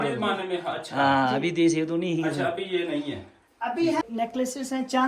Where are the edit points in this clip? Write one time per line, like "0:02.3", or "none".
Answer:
0:04.0

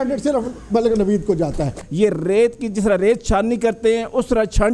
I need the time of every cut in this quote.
0:01.8

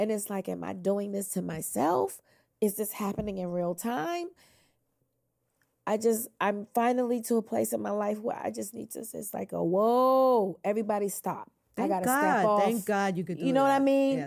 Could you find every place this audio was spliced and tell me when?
none

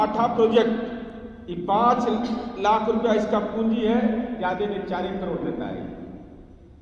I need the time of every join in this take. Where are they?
none

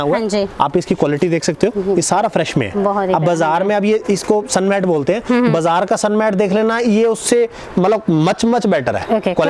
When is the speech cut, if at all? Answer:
none

